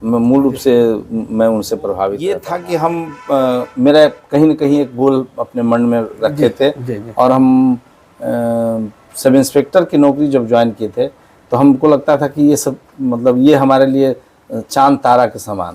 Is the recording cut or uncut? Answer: cut